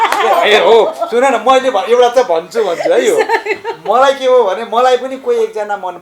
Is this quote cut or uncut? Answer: uncut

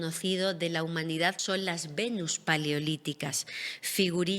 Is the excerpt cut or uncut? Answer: cut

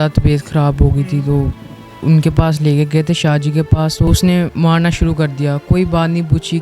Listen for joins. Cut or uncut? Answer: cut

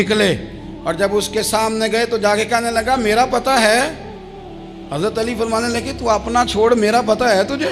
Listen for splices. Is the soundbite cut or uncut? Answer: uncut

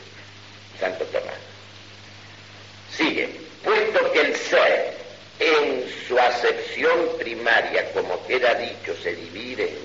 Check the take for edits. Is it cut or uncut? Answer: uncut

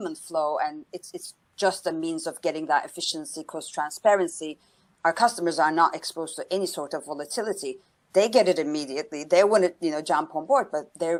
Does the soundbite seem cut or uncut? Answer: uncut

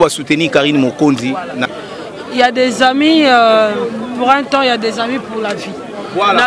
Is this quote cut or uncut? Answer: cut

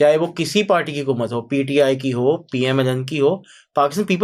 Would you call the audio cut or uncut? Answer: uncut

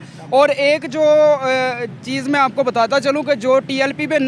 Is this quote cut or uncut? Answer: uncut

